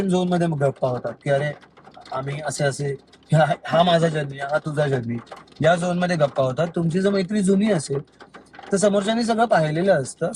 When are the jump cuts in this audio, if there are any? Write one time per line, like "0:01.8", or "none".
none